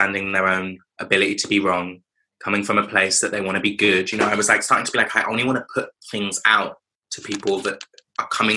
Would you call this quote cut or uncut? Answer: uncut